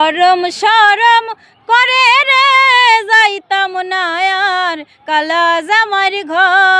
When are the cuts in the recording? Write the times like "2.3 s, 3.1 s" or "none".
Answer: none